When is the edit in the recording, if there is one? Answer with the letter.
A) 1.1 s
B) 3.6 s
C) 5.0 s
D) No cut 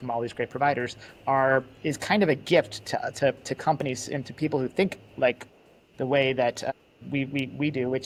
D